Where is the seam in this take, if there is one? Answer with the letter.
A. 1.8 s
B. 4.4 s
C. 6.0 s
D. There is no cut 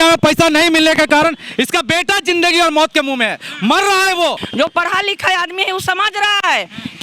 B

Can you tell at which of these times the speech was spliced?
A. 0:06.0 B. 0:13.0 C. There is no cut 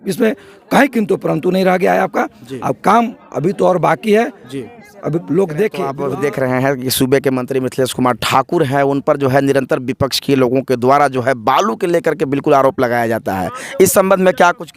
A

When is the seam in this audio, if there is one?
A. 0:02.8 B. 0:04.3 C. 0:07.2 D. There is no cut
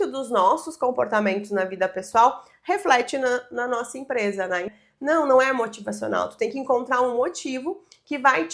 B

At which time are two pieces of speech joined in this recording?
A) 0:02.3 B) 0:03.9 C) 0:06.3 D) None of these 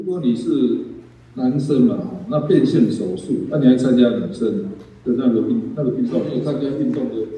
C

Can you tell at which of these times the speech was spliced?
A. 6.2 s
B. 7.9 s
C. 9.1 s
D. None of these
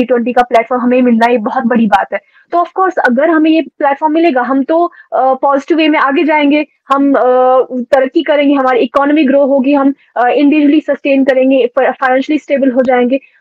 D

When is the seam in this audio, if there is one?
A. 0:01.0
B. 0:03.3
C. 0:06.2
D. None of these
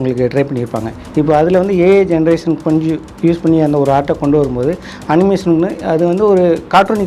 D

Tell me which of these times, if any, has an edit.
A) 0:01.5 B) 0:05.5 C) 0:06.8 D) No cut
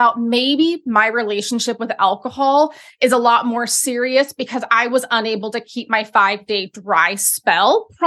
D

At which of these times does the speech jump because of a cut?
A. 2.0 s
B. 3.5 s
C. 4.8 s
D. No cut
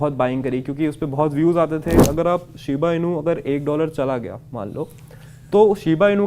A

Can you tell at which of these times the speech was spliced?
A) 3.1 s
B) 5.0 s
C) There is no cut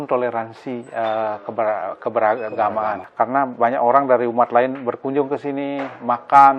A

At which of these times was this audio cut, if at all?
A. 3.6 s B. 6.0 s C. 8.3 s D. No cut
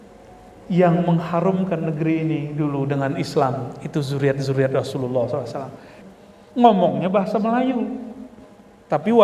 B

